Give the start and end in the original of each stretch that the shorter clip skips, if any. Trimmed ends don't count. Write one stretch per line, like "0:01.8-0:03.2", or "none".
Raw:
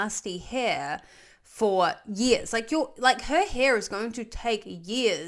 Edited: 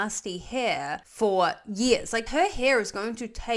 0:01.1-0:01.5
0:02.7-0:03.2